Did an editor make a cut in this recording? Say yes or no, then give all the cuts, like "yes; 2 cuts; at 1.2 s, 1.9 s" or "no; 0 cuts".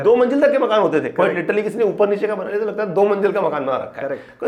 no; 0 cuts